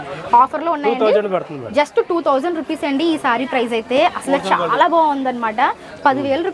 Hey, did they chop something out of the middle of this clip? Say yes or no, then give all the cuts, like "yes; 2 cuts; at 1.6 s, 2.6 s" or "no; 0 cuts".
no; 0 cuts